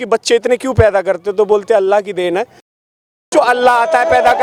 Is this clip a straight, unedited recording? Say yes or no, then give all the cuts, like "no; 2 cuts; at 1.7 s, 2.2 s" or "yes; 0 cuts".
yes; 0 cuts